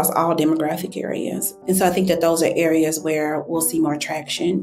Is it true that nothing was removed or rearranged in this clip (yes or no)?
no